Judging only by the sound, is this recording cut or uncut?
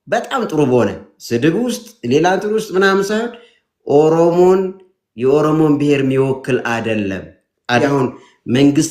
cut